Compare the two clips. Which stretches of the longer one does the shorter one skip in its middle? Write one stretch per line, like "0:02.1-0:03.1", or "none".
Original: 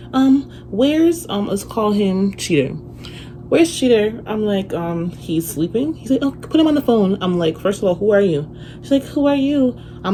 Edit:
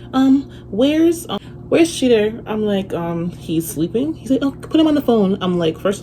0:01.3-0:03.1

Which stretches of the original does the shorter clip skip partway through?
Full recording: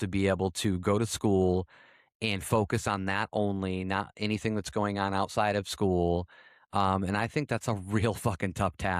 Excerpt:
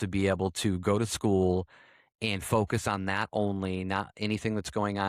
none

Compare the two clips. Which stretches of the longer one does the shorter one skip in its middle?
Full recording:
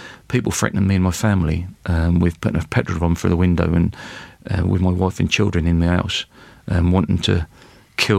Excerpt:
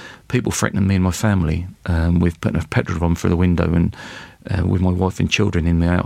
none

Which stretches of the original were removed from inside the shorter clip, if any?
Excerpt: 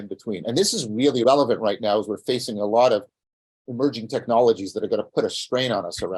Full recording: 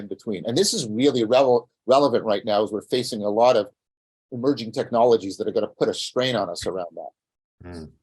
0:01.2-0:01.9

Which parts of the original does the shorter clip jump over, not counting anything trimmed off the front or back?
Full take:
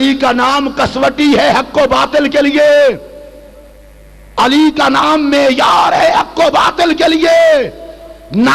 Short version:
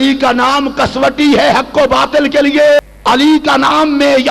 0:02.8-0:04.1

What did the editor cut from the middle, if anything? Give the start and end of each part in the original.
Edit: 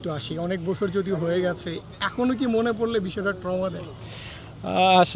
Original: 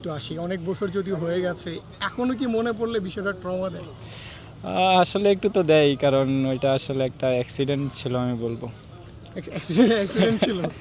none

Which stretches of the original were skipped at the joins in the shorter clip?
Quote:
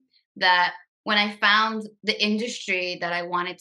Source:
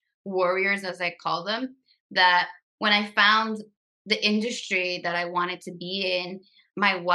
0:03.7-0:04.0

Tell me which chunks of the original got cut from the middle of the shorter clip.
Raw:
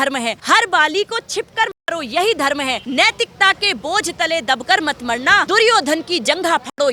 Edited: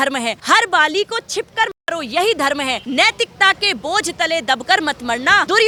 none

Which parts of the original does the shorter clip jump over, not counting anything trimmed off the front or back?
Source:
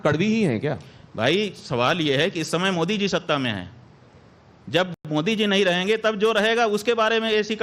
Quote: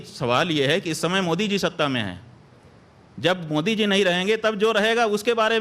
0:04.9-0:05.0

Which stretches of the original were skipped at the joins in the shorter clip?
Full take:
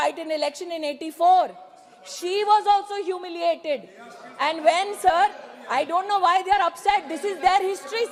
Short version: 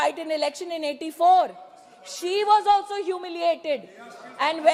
none

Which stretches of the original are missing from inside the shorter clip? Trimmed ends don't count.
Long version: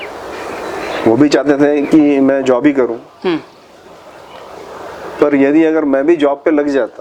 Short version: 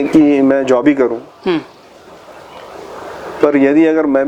none

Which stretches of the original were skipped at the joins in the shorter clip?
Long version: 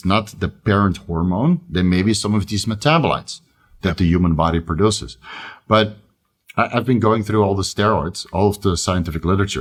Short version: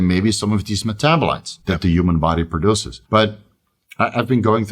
0:03.3-0:03.7
0:05.1-0:05.5

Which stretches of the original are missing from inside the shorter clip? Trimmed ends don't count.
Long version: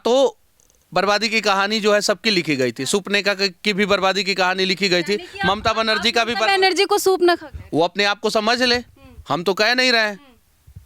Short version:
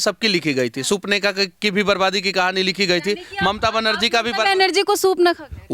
none

